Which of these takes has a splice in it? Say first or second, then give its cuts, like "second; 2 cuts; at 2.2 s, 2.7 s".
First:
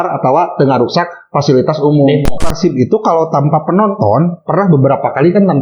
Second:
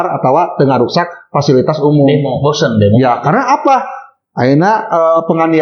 first; 1 cut; at 2.4 s